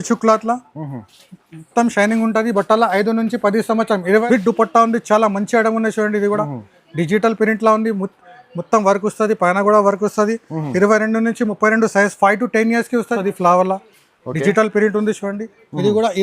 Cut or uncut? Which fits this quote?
cut